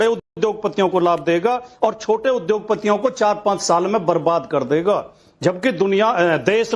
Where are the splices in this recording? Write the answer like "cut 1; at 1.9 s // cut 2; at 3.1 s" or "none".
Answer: cut 1; at 5.2 s